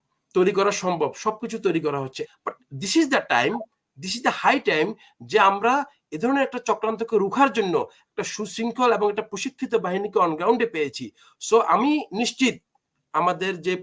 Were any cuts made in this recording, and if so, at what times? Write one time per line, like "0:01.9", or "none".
0:02.2